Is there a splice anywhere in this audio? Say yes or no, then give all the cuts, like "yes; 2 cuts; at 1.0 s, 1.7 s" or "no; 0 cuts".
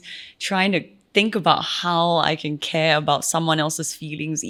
no; 0 cuts